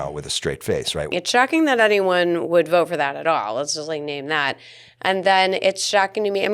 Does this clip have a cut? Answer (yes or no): yes